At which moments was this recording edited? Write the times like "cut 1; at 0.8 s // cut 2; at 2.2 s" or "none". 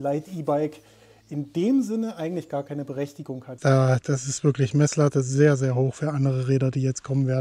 cut 1; at 3.5 s